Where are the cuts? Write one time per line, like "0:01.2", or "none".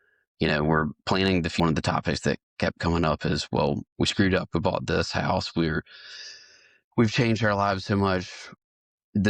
0:01.6